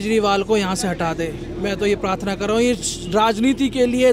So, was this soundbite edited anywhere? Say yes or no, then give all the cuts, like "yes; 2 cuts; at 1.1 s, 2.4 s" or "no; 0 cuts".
no; 0 cuts